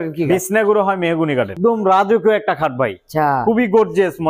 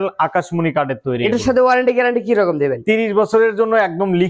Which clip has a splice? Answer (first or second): first